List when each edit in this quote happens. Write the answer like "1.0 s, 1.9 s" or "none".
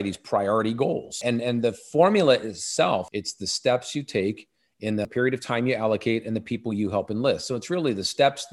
1.1 s, 3.1 s, 5.1 s